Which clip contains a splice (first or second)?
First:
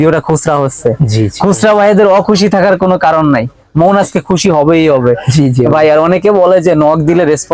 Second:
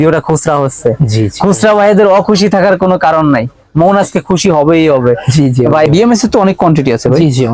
second